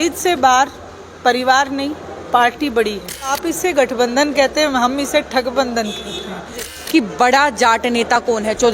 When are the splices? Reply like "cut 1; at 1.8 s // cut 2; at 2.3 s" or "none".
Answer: cut 1; at 3.4 s // cut 2; at 6.7 s